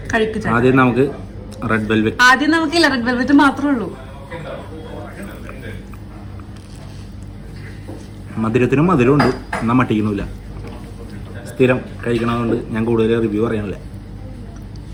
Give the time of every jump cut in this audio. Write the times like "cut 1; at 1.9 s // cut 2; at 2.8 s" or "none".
none